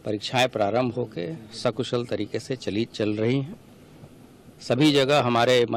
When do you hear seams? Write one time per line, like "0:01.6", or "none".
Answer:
0:01.4

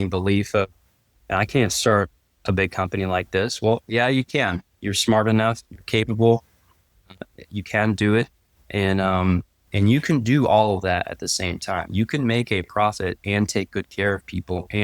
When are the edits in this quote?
0:04.8
0:09.7

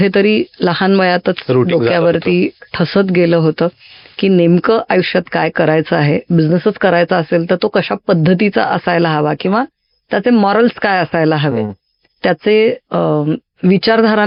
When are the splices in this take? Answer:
none

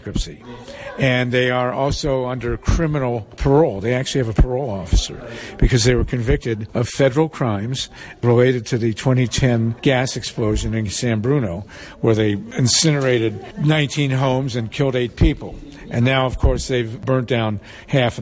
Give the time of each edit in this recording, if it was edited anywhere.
0:03.3
0:06.6
0:08.2
0:09.8
0:12.5
0:13.5
0:17.0

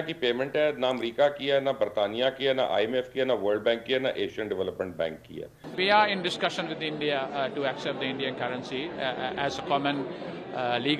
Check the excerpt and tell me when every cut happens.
0:05.6

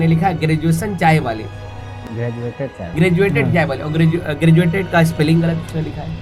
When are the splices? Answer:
none

